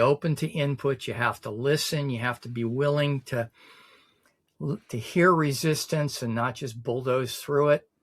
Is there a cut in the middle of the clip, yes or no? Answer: no